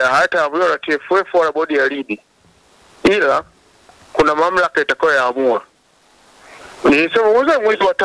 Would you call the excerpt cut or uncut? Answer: uncut